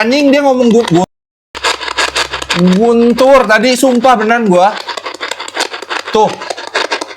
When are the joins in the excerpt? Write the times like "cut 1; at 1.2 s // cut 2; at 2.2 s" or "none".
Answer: cut 1; at 1.0 s